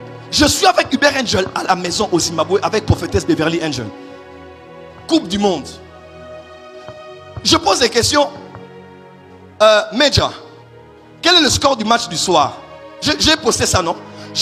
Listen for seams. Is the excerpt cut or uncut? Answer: uncut